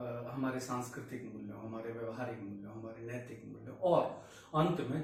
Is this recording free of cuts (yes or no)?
yes